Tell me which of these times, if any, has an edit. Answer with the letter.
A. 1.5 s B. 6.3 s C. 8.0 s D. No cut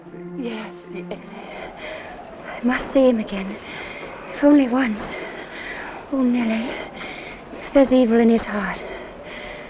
A